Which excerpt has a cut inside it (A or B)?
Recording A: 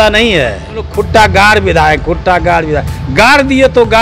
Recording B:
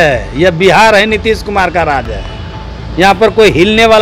A